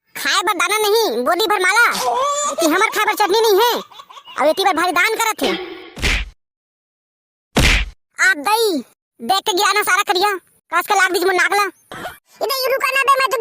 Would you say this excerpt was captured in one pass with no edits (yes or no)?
no